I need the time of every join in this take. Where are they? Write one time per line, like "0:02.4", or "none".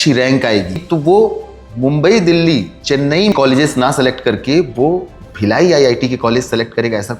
0:00.8
0:03.3